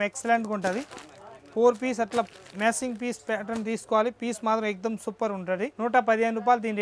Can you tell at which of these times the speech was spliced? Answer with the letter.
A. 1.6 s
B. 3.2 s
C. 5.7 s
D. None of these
C